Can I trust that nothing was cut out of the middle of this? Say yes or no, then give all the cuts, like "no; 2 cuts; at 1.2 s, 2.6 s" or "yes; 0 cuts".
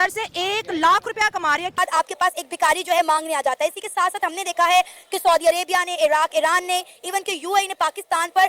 no; 1 cut; at 1.8 s